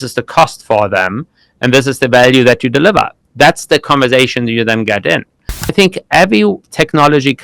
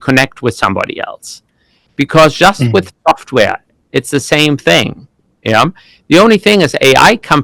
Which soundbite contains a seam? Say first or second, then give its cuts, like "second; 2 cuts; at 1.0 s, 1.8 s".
first; 1 cut; at 5.7 s